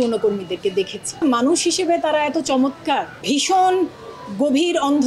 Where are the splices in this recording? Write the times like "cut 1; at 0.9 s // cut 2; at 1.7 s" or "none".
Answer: cut 1; at 1.2 s // cut 2; at 3.1 s